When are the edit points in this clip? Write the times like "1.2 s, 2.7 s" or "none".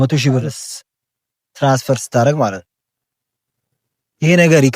none